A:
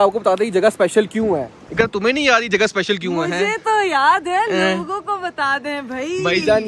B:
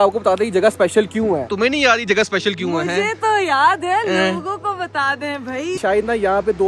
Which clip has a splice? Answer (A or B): B